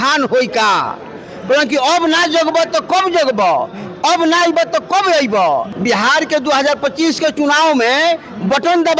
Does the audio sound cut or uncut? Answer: cut